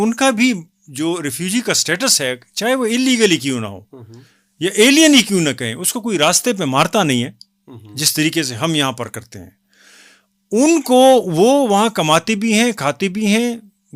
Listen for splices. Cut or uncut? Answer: uncut